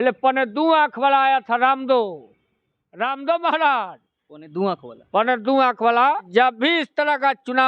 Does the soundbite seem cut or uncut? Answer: cut